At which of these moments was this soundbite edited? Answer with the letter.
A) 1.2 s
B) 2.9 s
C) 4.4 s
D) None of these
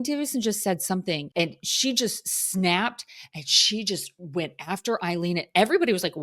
A